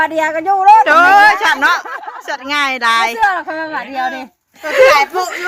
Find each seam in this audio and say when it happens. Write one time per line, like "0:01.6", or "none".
none